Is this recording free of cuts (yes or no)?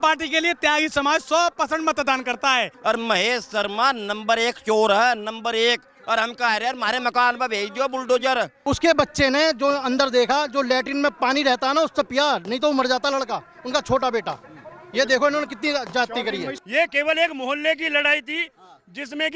no